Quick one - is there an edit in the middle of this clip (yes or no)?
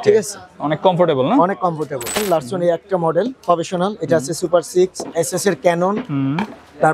yes